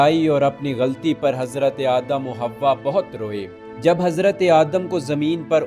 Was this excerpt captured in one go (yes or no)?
no